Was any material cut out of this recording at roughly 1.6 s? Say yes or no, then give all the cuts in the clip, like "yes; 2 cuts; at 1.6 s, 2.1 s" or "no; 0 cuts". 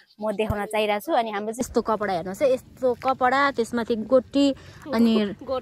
yes; 1 cut; at 1.6 s